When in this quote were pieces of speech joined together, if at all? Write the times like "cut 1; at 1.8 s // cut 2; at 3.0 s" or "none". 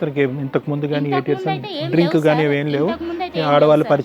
none